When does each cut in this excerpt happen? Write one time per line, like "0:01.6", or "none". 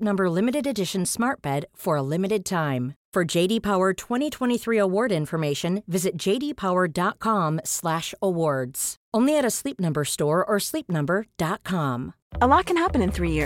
none